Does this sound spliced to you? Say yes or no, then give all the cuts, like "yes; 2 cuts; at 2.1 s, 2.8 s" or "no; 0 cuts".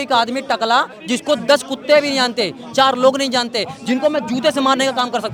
no; 0 cuts